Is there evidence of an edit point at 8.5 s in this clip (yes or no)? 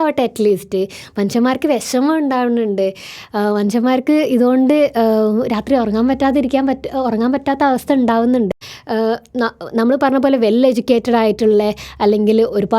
yes